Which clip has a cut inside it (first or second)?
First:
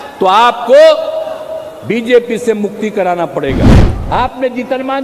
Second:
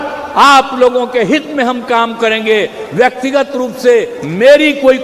first